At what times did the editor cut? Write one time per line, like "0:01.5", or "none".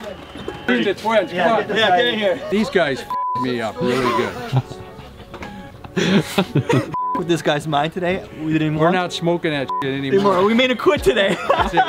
0:00.7
0:02.4